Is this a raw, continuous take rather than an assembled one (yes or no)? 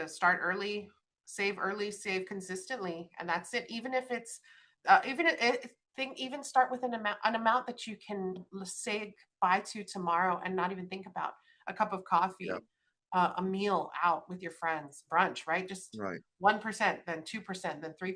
yes